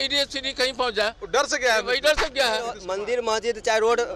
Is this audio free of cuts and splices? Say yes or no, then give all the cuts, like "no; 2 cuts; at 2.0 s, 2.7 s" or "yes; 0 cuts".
no; 1 cut; at 2.8 s